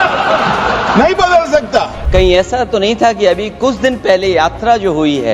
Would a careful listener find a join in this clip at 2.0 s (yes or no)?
yes